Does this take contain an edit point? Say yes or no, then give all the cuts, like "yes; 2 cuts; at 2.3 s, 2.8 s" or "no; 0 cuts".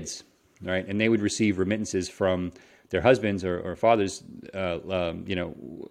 no; 0 cuts